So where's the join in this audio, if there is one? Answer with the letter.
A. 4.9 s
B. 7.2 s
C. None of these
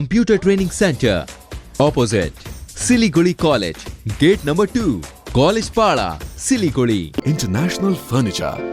B